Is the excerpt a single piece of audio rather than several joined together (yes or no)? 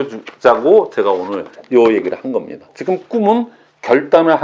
no